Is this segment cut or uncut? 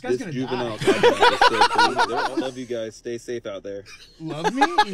cut